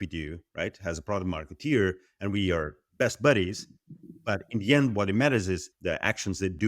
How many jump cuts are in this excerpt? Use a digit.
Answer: 1